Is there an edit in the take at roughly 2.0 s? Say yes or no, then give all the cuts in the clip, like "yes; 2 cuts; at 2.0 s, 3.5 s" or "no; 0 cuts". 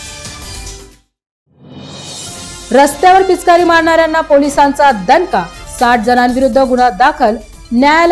no; 0 cuts